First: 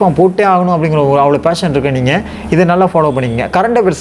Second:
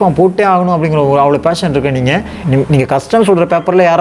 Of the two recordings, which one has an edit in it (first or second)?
second